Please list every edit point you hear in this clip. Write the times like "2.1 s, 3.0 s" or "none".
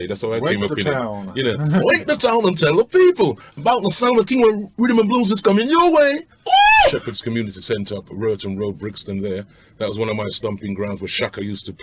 7.1 s